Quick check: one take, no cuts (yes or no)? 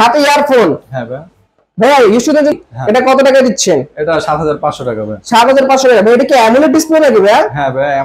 no